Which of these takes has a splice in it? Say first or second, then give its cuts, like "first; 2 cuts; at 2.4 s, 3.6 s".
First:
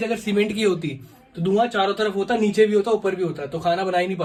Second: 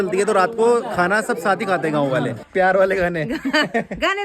second; 1 cut; at 2.4 s